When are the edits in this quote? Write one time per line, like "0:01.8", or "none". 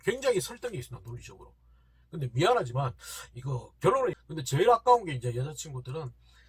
0:04.1